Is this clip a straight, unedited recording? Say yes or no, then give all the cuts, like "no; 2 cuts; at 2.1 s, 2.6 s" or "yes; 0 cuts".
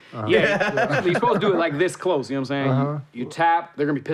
yes; 0 cuts